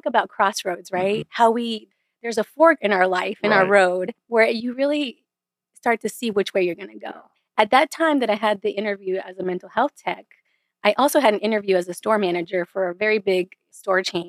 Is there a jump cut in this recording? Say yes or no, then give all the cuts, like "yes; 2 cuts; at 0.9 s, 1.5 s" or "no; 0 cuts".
yes; 2 cuts; at 1.3 s, 4.2 s